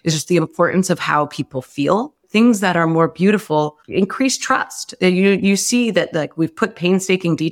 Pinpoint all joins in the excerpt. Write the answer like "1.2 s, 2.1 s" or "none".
2.2 s, 3.8 s